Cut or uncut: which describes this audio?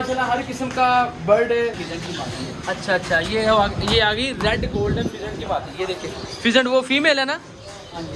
cut